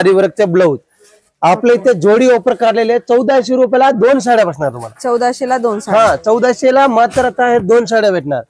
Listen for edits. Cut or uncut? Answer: uncut